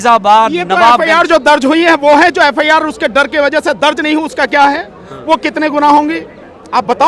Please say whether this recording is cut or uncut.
uncut